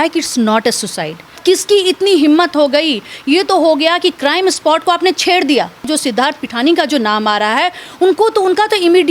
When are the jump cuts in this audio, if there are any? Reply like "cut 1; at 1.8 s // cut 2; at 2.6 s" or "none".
cut 1; at 1.4 s // cut 2; at 5.9 s